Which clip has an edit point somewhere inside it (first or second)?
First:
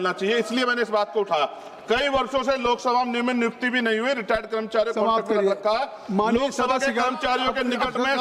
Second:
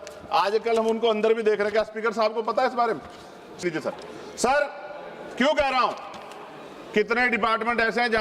second